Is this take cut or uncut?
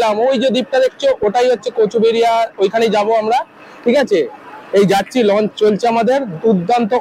uncut